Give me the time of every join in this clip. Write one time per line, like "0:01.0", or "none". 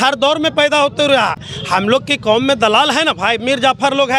none